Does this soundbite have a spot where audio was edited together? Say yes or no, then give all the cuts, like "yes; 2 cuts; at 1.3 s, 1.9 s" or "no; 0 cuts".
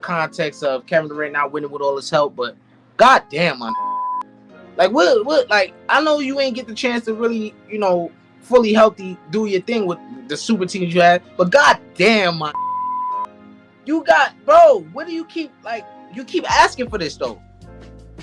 no; 0 cuts